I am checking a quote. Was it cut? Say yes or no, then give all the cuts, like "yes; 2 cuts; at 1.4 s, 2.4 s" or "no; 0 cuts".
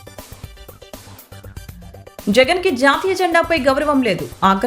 yes; 1 cut; at 1.6 s